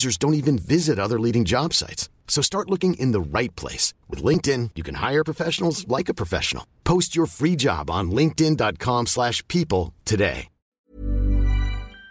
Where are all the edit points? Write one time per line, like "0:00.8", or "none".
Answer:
0:10.8

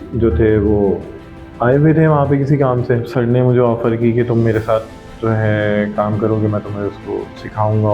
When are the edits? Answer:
0:03.0

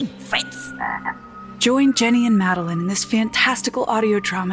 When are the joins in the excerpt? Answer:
none

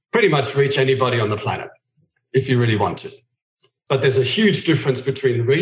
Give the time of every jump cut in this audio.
0:03.8

